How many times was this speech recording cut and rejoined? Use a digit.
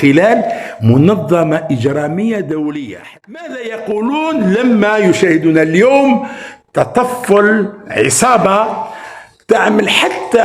1